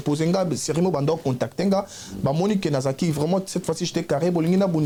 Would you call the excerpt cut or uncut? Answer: uncut